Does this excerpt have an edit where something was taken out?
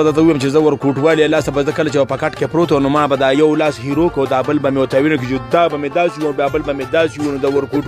no; 0 cuts

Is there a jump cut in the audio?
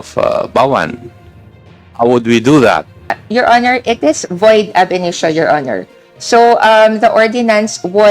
yes; 1 cut; at 3.2 s

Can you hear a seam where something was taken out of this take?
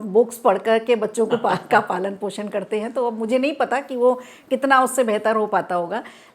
no; 0 cuts

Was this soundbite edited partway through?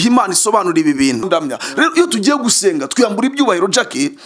yes; 1 cut; at 1.2 s

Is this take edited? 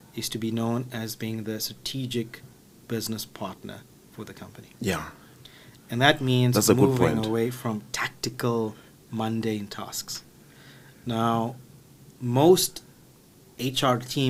no; 0 cuts

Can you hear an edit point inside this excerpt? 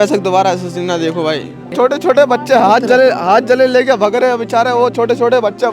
yes; 1 cut; at 1.7 s

